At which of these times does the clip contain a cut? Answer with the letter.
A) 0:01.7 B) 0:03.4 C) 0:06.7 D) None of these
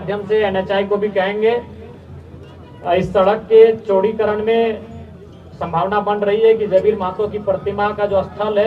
D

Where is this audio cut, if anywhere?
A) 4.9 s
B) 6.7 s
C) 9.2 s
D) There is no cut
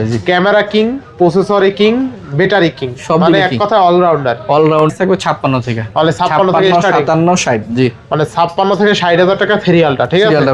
A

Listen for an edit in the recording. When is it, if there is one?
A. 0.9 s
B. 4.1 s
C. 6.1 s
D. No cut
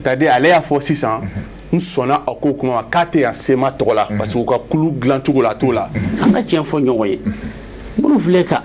C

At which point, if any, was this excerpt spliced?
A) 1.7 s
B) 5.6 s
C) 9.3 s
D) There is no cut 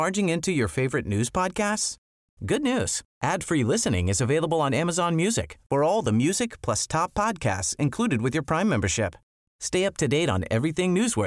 D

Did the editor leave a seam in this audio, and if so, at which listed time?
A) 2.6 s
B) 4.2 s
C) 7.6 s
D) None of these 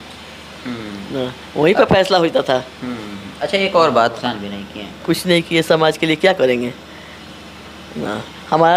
B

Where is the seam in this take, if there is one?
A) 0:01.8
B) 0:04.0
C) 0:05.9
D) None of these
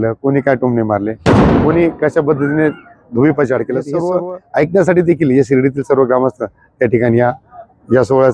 B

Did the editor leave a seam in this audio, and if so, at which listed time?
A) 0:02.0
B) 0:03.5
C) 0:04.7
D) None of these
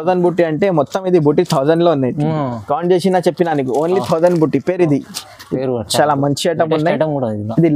D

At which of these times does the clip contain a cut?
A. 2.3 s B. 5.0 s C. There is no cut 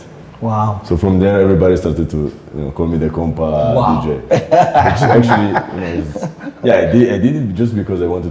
C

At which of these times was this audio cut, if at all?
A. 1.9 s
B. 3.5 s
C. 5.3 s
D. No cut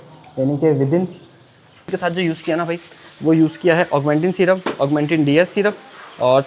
A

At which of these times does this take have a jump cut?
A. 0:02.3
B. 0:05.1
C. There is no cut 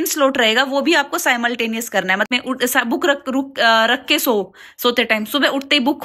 A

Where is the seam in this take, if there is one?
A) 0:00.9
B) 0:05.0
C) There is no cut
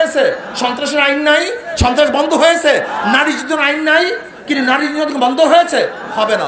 C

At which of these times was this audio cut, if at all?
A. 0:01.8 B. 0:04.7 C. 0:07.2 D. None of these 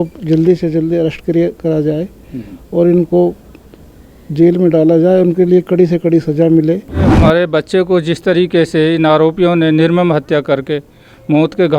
C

